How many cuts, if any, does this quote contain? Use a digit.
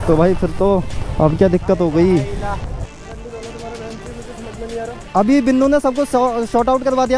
3